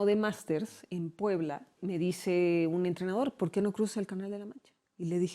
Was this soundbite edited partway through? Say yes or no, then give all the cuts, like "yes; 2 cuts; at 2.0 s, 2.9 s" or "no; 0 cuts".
yes; 1 cut; at 1.8 s